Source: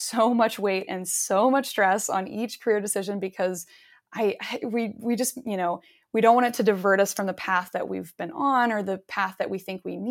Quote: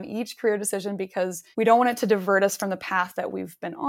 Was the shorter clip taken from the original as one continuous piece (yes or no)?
no